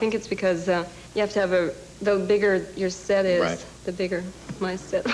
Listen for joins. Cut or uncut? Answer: cut